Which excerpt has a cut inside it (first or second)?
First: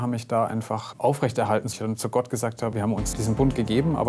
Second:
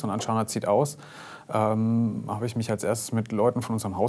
first